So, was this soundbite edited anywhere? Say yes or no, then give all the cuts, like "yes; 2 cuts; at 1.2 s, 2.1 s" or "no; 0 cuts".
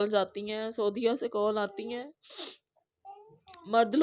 no; 0 cuts